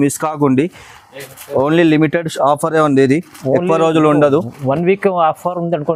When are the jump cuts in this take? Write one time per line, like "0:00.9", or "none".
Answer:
none